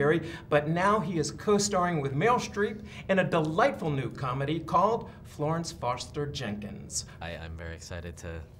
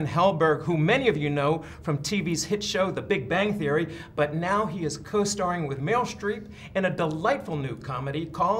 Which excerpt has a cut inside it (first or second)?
first